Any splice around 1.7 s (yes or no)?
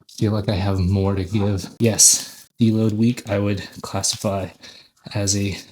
yes